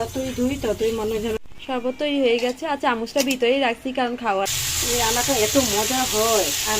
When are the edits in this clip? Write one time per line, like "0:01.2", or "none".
0:01.5
0:04.5